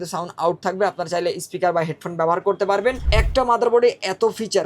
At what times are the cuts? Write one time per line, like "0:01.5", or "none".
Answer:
0:03.0